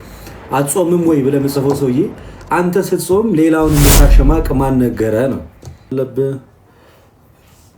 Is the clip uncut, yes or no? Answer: no